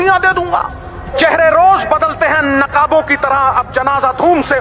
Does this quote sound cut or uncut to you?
cut